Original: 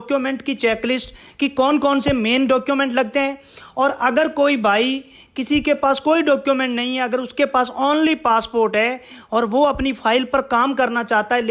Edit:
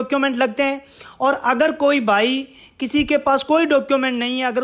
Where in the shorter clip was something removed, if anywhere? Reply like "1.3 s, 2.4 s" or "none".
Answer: none

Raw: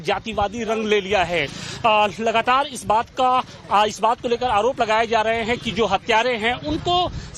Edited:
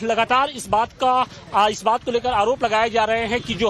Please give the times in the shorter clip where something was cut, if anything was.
none

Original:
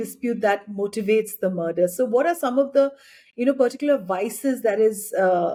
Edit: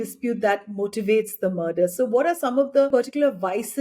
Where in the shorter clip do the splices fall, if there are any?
2.9 s

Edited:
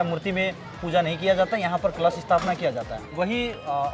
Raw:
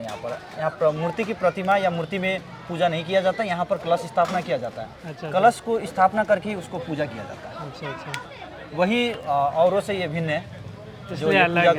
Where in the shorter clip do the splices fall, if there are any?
3.0 s

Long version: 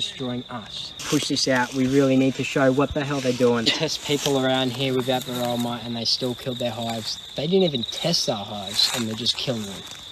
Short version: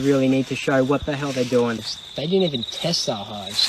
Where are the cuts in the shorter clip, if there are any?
1.8 s

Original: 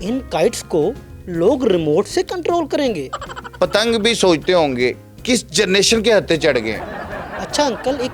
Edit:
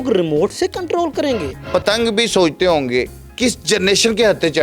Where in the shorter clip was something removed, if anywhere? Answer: 1.5 s

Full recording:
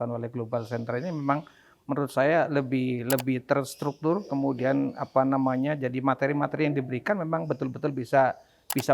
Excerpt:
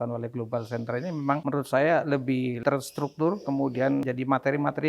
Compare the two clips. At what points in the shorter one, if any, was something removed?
1.4 s, 2.6 s, 4.1 s

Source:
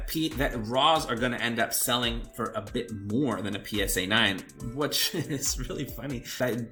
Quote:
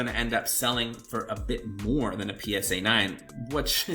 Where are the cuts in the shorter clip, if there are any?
none

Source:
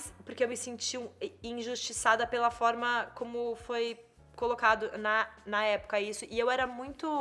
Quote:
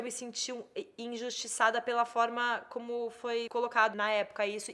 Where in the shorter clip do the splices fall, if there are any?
3.8 s

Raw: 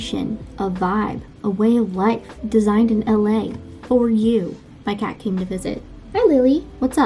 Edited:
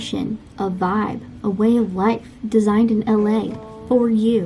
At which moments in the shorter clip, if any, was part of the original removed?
none

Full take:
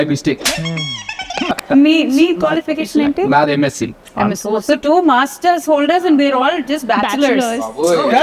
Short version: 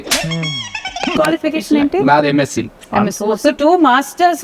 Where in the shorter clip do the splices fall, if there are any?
1.1 s

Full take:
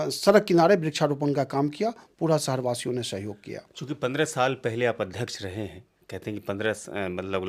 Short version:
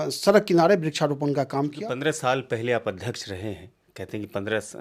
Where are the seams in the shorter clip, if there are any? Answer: 1.8 s

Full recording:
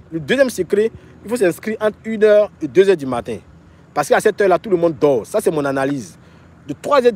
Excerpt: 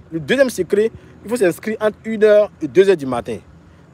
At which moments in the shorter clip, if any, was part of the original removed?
none

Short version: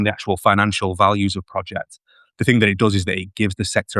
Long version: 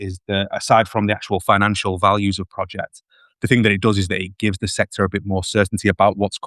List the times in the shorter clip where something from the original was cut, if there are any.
none

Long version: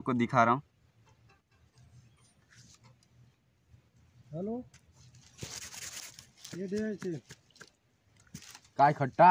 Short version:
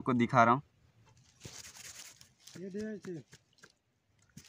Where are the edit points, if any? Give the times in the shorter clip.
1.1 s

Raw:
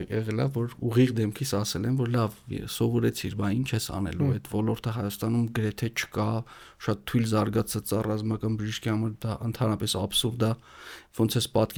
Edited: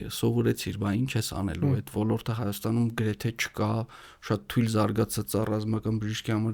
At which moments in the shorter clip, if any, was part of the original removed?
none

